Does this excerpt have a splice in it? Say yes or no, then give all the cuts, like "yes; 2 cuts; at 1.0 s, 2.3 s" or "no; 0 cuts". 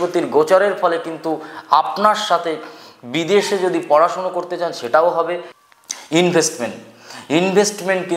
yes; 1 cut; at 5.5 s